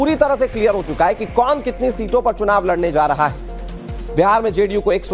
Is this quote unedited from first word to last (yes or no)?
no